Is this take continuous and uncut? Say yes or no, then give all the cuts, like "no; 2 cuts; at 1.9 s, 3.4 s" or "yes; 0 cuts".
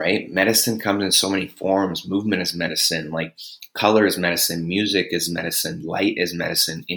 yes; 0 cuts